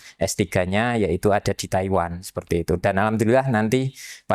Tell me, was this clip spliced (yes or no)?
no